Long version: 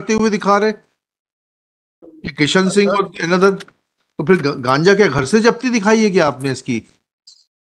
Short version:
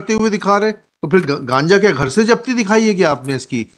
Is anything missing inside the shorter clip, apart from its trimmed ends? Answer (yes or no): yes